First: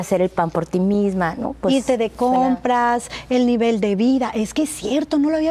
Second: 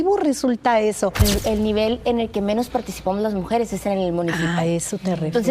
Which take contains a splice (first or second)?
second